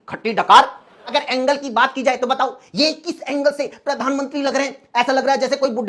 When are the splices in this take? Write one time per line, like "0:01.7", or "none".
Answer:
0:01.1